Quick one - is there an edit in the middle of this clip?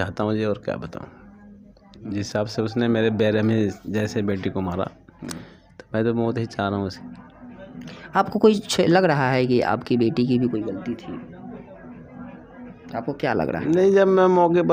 no; 0 cuts

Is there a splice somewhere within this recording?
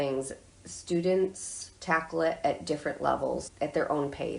yes; 1 cut; at 3.5 s

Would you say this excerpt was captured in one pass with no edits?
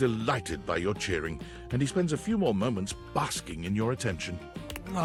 yes; 0 cuts

